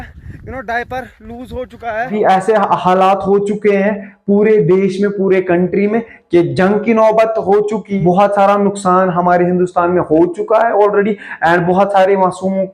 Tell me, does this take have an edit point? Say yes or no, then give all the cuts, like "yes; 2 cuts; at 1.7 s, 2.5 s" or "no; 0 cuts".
yes; 2 cuts; at 2.1 s, 7.9 s